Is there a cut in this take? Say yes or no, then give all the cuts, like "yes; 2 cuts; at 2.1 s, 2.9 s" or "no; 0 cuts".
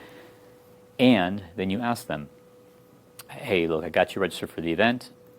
yes; 1 cut; at 3.3 s